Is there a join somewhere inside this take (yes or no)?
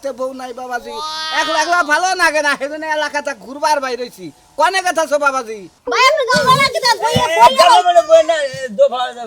yes